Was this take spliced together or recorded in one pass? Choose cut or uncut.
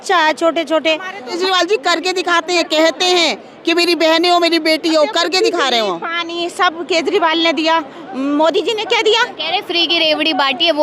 cut